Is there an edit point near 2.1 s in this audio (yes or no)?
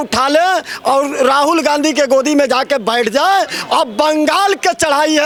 no